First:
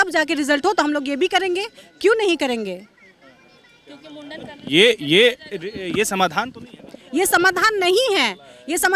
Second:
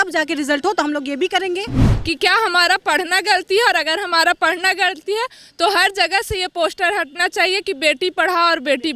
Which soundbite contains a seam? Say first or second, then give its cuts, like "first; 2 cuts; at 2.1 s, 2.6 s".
second; 1 cut; at 1.9 s